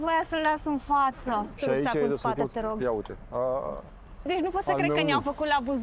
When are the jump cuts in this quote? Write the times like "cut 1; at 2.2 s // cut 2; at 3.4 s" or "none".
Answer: cut 1; at 1.5 s // cut 2; at 4.2 s